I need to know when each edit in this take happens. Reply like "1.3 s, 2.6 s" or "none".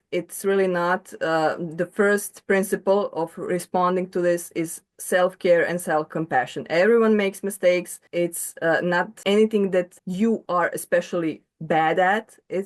6.1 s, 8.0 s, 9.1 s, 10.0 s